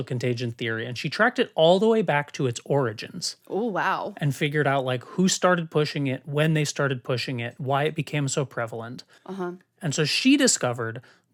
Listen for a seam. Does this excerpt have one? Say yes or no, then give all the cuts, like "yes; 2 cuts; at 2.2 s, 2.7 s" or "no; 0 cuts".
no; 0 cuts